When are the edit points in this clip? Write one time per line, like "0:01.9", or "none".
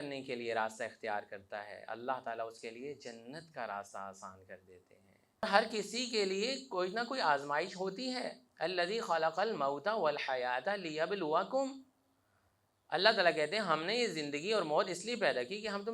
0:05.4